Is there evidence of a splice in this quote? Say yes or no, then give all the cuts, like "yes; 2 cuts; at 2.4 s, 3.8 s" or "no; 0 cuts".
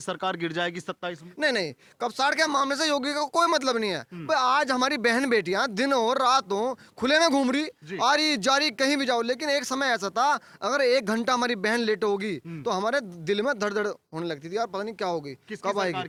no; 0 cuts